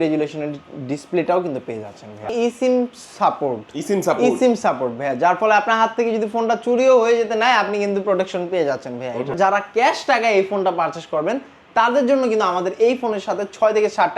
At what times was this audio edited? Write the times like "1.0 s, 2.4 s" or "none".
2.3 s, 9.3 s